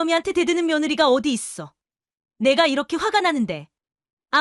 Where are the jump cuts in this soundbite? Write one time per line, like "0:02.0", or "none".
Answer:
none